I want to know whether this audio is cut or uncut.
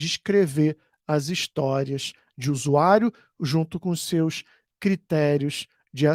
uncut